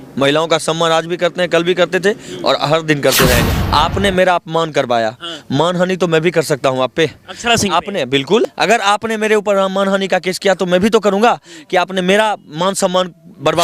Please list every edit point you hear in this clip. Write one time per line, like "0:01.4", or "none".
0:03.5
0:08.5

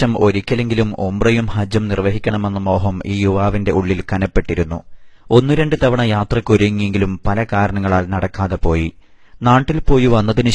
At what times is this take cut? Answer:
0:03.0

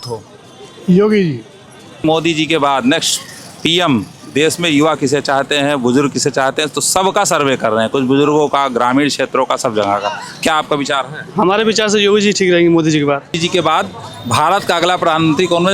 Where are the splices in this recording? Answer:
0:02.0
0:13.4

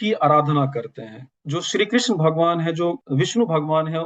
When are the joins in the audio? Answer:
0:01.3
0:03.0

